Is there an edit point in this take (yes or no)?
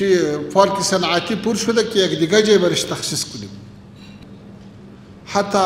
yes